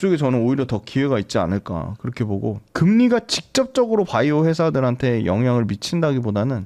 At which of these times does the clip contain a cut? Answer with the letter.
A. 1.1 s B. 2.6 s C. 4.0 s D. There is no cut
D